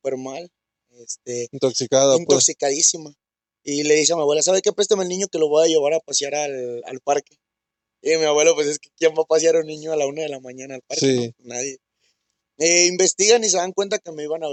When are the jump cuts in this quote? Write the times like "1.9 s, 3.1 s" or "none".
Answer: none